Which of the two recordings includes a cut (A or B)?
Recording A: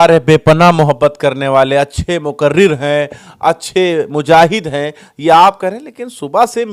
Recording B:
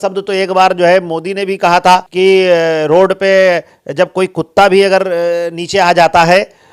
B